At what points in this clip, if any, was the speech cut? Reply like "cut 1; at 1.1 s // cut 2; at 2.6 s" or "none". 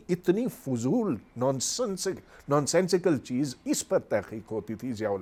none